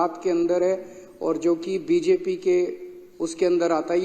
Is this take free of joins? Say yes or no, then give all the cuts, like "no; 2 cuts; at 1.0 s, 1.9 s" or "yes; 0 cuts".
yes; 0 cuts